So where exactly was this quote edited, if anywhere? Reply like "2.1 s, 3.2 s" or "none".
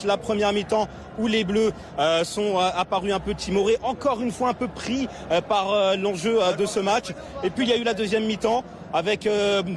6.2 s